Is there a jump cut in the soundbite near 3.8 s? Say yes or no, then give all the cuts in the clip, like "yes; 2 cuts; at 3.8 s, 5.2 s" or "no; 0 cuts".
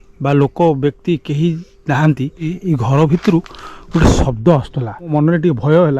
no; 2 cuts; at 2.6 s, 5.1 s